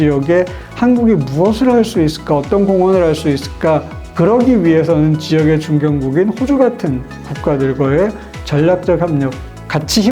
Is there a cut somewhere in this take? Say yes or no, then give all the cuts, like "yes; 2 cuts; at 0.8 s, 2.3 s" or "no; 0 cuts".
yes; 1 cut; at 4.0 s